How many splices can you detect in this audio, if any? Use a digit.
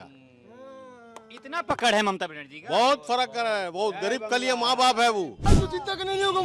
1